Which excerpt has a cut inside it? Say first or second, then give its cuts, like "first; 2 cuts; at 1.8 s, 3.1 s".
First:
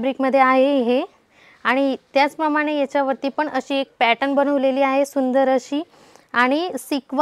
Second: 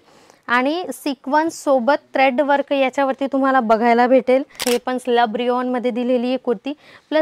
second; 1 cut; at 4.5 s